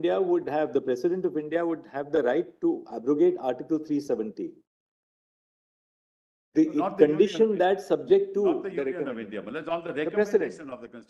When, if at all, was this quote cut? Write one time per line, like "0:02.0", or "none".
none

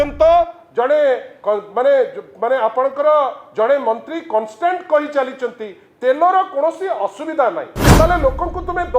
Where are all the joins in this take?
0:07.8

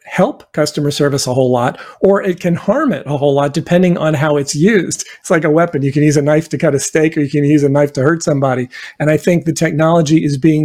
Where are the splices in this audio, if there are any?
0:05.1

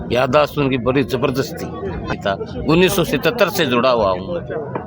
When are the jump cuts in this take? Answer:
0:02.1

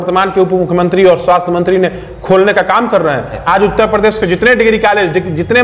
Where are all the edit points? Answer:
0:03.3

